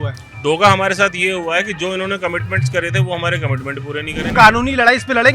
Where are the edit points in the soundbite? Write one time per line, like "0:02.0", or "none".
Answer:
0:04.3